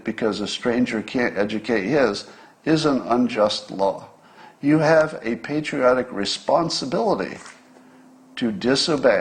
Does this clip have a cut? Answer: no; 0 cuts

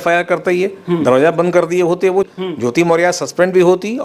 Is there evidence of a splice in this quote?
yes; 1 cut; at 2.3 s

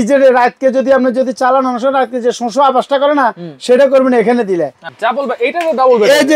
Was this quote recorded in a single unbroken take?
no; 1 cut; at 4.8 s

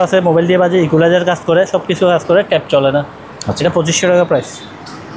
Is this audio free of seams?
yes; 0 cuts

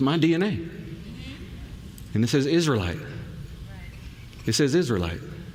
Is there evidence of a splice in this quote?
no; 0 cuts

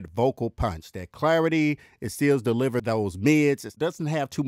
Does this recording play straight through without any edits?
no; 2 cuts; at 2.8 s, 3.7 s

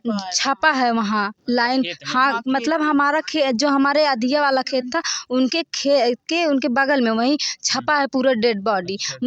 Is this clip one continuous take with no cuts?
yes; 0 cuts

